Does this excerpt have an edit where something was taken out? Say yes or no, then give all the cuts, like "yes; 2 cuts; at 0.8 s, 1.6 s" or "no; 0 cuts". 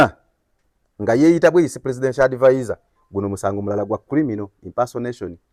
no; 0 cuts